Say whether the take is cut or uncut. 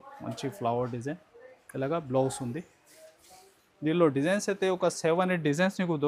uncut